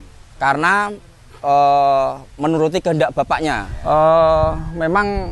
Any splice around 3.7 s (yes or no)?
yes